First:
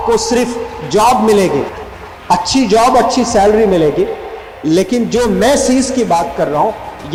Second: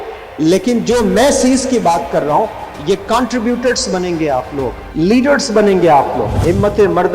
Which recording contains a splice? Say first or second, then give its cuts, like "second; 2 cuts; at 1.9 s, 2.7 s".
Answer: second; 2 cuts; at 4.8 s, 6.3 s